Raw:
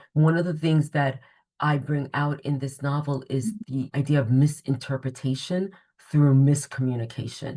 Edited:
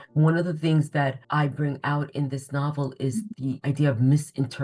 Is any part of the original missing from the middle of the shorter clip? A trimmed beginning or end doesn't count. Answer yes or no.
yes